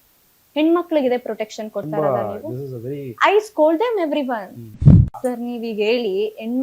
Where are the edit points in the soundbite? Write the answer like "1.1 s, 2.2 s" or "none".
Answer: 4.9 s